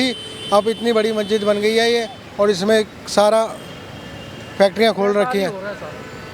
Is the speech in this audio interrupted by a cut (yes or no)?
no